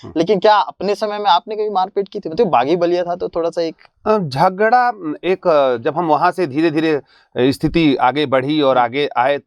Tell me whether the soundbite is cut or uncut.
uncut